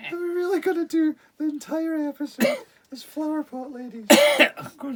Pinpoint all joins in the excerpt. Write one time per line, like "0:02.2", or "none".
none